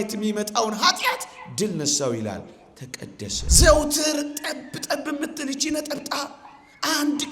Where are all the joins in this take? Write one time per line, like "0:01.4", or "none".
0:03.4